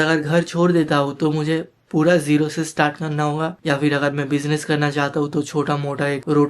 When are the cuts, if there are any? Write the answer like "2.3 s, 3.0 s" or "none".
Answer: 3.6 s